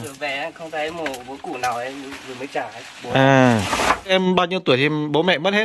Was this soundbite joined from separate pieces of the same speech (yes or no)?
yes